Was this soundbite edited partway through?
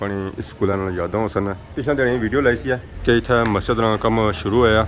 no; 0 cuts

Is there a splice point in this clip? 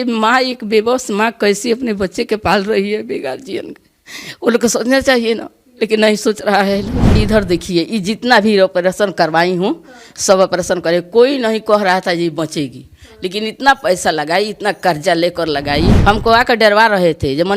yes; 2 cuts; at 7.2 s, 16.0 s

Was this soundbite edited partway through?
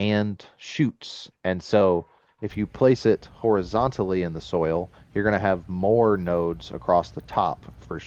no; 0 cuts

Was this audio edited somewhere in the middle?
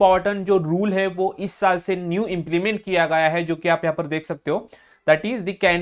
no; 0 cuts

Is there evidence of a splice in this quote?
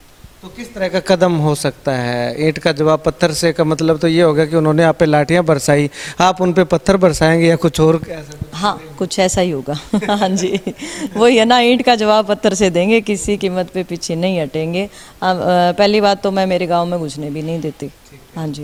no; 0 cuts

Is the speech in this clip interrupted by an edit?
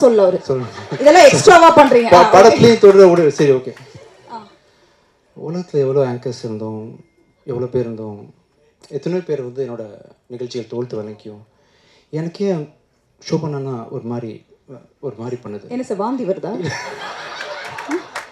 no; 0 cuts

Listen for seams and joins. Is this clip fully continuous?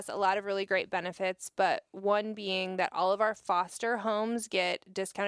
yes; 0 cuts

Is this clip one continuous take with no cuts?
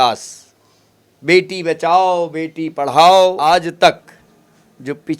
no; 1 cut; at 3.4 s

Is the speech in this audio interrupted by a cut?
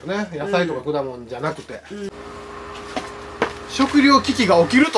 yes; 1 cut; at 2.1 s

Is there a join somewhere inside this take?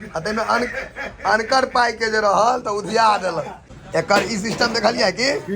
yes; 1 cut; at 3.8 s

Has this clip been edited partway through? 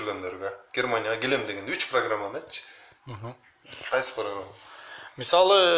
no; 0 cuts

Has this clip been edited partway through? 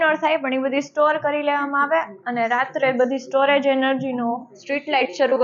no; 0 cuts

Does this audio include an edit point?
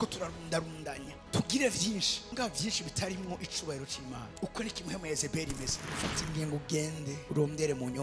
yes; 1 cut; at 5.8 s

